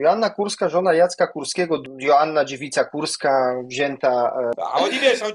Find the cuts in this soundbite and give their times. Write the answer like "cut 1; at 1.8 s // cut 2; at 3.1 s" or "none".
cut 1; at 1.8 s // cut 2; at 4.6 s